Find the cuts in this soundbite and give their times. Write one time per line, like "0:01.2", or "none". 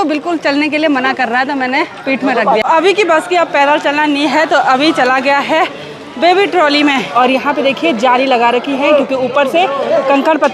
0:02.6
0:07.1